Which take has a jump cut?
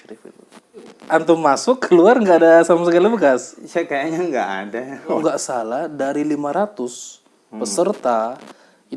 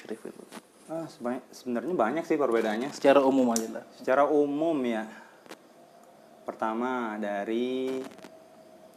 first; 2 cuts; at 0.9 s, 5.2 s

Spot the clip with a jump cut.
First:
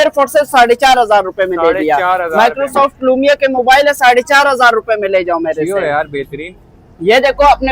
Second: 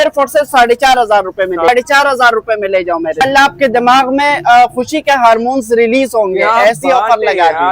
second; 2 cuts; at 1.7 s, 3.2 s

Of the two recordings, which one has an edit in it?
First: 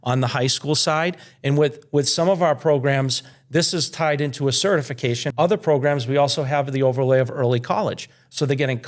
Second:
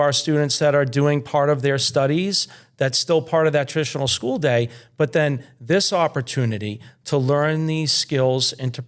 first; 1 cut; at 5.2 s

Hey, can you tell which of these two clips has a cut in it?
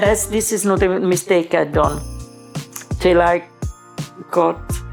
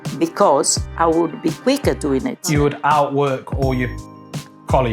second; 1 cut; at 2.6 s

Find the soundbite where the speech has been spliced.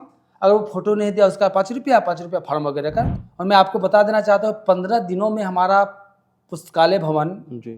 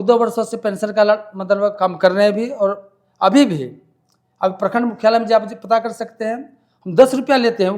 first; 1 cut; at 3.1 s

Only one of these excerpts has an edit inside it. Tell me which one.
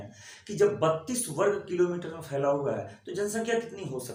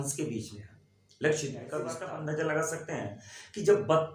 second; 1 cut; at 2.0 s

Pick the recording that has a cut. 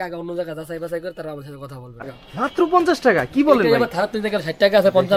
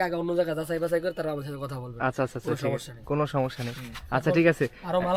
first; 1 cut; at 2.0 s

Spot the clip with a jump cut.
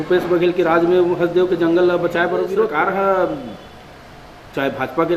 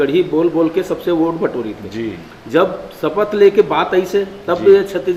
first; 1 cut; at 2.7 s

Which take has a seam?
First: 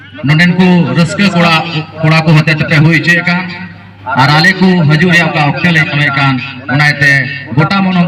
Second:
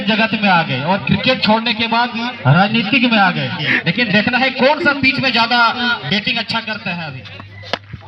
second; 1 cut; at 7.2 s

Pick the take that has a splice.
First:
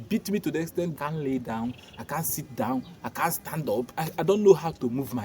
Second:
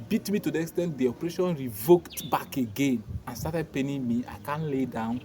first; 2 cuts; at 0.9 s, 4.0 s

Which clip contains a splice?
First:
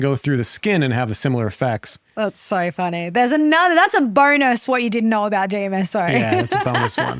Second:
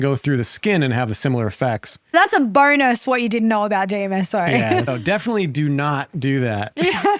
second; 2 cuts; at 2.1 s, 4.9 s

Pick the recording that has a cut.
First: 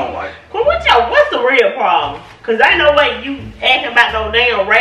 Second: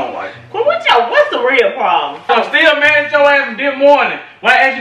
second; 1 cut; at 2.3 s

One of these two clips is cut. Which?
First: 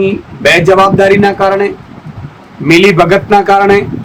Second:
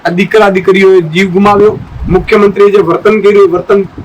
second; 1 cut; at 1.9 s

